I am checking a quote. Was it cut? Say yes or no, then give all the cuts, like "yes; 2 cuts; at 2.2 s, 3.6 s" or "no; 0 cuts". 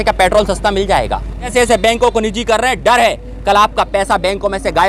yes; 1 cut; at 1.5 s